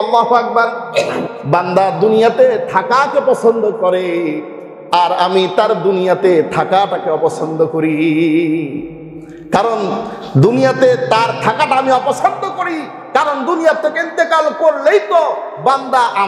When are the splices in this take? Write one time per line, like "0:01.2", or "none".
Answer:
0:01.2